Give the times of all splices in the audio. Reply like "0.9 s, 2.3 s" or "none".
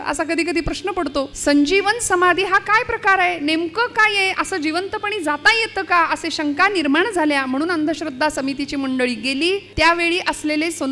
1.3 s, 9.7 s